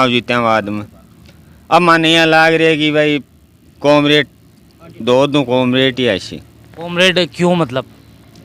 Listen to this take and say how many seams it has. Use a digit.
0